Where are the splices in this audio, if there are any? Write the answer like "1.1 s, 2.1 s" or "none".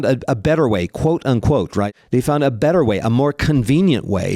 1.9 s